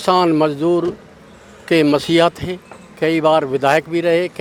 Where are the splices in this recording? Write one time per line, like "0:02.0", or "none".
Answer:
none

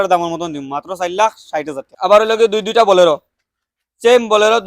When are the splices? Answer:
0:01.9

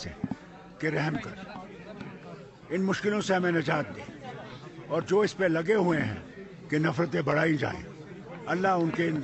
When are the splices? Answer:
none

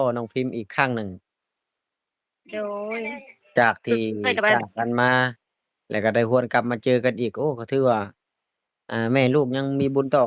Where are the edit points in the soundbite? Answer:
none

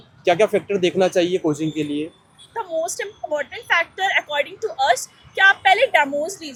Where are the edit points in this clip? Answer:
none

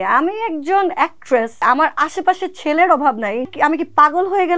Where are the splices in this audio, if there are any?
0:01.6
0:03.5

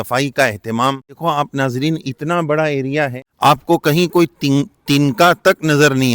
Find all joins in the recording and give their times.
0:01.2
0:03.2

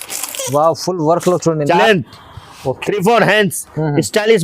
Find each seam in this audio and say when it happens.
0:01.8

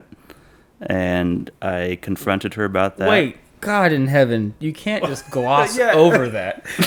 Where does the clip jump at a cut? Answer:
none

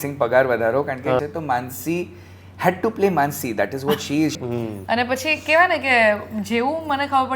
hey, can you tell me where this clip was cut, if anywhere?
0:01.2
0:04.4

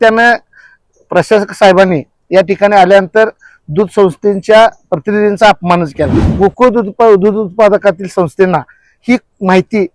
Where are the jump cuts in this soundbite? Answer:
0:06.2

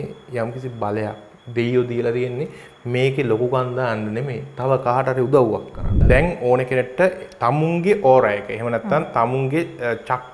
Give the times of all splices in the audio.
0:06.0

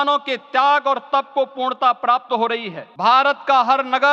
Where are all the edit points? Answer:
0:02.8

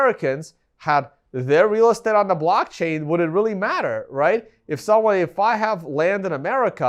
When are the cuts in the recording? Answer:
none

